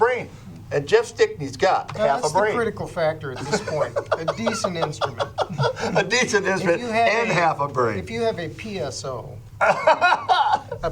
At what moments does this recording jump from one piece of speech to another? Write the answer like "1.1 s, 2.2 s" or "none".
none